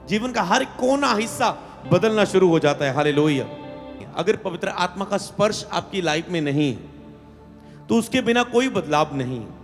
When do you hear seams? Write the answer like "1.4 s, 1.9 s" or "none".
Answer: 4.0 s